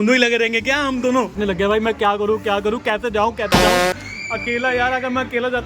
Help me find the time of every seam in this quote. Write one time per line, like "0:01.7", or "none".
0:01.2
0:03.5
0:04.1